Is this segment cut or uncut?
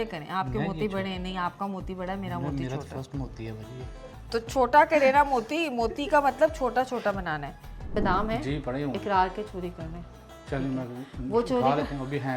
cut